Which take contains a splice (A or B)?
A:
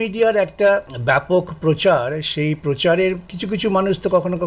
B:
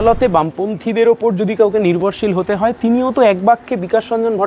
A